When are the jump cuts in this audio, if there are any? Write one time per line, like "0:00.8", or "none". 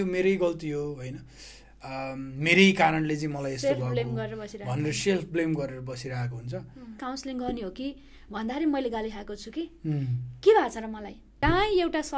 0:07.0
0:11.3